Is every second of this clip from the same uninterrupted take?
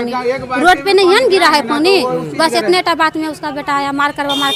yes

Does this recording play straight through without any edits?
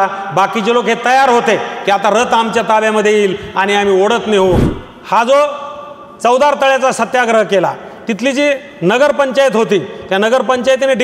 no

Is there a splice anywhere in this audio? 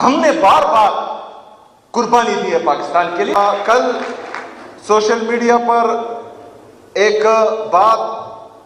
yes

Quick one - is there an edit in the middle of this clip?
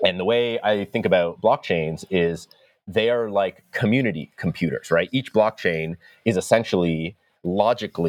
no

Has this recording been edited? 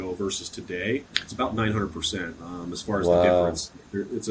yes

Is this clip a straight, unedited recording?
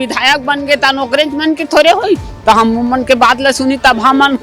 yes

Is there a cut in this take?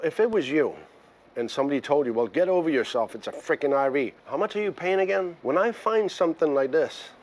yes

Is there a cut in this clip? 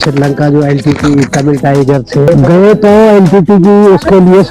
yes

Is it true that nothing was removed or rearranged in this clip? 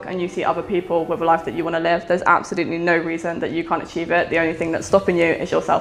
yes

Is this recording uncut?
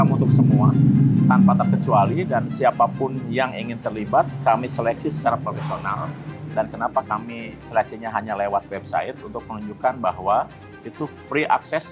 yes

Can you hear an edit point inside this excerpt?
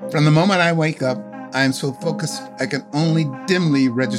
yes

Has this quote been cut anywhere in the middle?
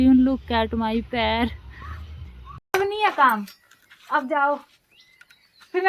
yes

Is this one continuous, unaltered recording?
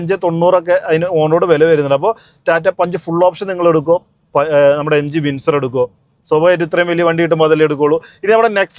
yes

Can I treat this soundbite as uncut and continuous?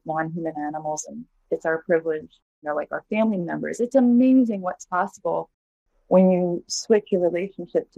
no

